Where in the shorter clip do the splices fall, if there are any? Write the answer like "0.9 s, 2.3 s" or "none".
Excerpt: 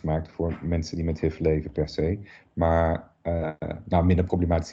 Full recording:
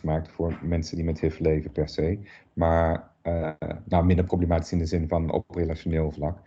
none